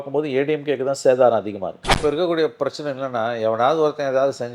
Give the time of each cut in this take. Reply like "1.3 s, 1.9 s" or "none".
1.9 s